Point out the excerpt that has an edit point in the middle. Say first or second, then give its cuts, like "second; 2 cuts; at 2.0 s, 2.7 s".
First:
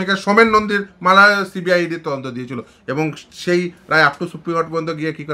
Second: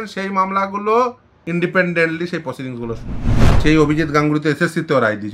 second; 2 cuts; at 1.3 s, 3.6 s